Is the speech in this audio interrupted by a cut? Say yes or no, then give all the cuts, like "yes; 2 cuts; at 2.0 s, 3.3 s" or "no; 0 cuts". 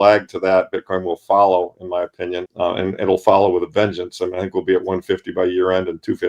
yes; 1 cut; at 2.4 s